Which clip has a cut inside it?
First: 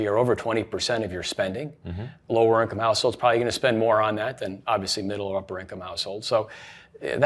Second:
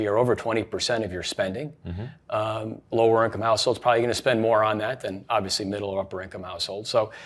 first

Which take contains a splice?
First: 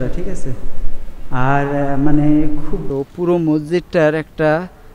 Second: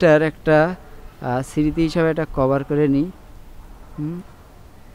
first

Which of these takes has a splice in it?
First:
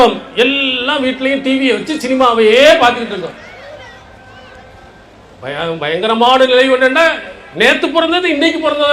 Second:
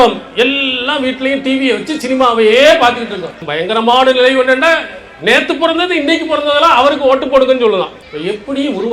second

